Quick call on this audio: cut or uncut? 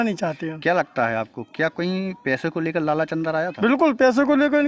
uncut